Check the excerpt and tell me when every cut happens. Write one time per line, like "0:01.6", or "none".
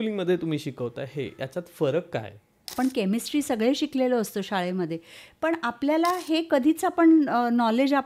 0:02.7